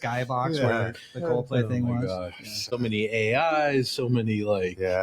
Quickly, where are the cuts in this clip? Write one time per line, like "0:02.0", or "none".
0:02.5